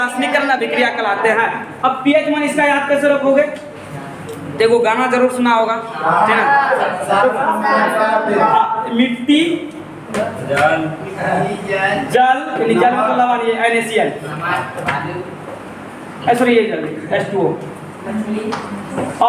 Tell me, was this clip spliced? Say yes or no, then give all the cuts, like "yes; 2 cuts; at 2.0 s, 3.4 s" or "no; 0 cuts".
no; 0 cuts